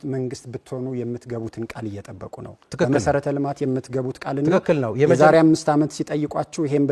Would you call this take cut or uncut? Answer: uncut